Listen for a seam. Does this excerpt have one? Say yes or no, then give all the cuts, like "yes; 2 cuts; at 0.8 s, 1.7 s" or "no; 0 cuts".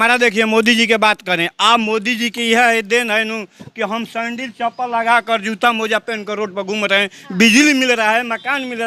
no; 0 cuts